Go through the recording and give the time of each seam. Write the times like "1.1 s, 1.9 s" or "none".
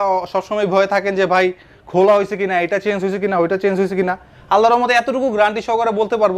none